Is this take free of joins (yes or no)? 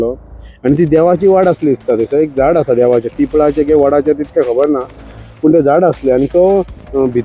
yes